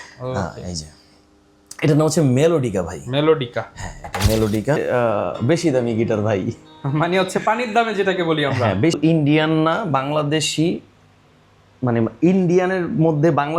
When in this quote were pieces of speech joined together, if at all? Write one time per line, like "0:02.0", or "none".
0:04.8
0:09.0